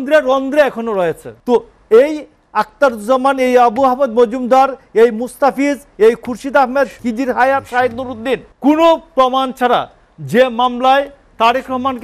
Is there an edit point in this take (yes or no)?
yes